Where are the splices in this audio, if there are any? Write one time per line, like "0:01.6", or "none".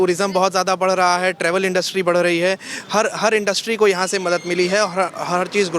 none